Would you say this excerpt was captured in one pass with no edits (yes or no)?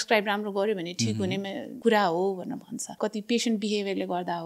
no